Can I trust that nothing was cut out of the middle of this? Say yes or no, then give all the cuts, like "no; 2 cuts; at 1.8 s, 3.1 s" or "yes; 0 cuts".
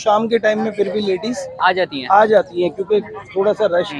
yes; 0 cuts